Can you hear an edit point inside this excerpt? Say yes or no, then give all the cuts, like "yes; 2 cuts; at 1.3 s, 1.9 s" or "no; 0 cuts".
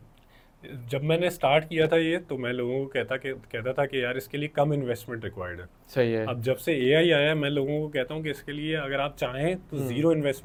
no; 0 cuts